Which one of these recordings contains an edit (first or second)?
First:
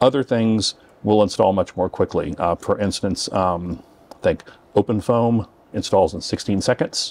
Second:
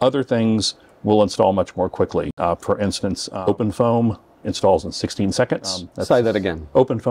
second